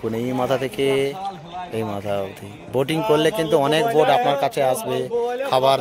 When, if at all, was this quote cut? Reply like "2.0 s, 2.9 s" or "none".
none